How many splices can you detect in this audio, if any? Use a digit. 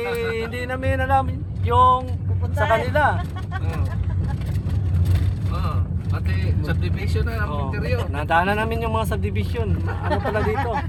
0